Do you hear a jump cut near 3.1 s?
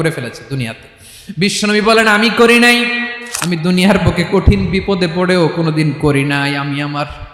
yes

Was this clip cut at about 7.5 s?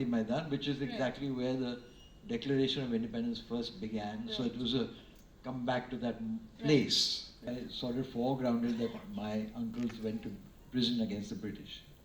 yes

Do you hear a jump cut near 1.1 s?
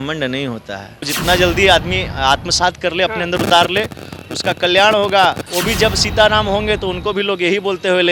yes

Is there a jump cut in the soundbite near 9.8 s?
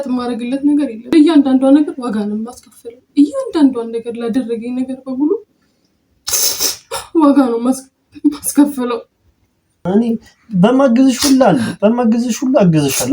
yes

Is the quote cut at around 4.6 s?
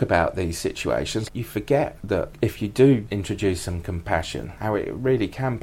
no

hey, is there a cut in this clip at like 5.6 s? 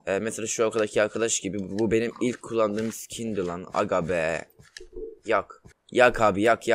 yes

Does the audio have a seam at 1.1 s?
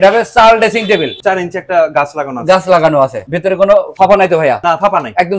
yes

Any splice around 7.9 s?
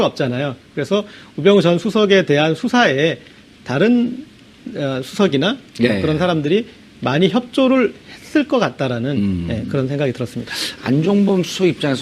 no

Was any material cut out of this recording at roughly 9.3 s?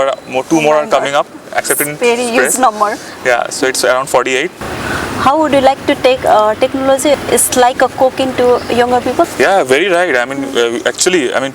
yes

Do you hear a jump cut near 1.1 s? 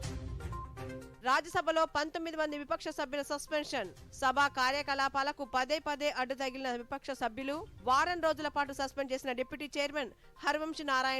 yes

